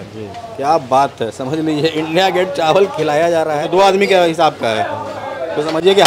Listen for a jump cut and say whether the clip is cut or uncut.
uncut